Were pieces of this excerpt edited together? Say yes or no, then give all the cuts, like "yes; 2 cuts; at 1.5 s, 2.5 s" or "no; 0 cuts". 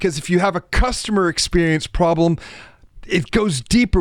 no; 0 cuts